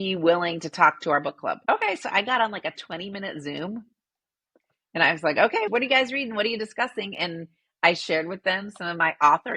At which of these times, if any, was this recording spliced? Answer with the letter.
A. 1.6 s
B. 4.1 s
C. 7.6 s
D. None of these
A